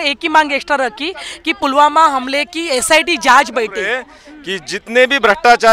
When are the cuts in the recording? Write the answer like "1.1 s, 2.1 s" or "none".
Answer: 4.1 s